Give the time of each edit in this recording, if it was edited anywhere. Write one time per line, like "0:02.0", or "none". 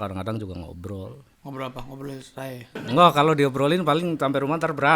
0:01.3
0:02.8